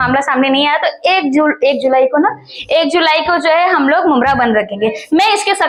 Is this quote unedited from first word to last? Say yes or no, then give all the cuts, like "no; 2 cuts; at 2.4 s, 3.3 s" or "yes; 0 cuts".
yes; 0 cuts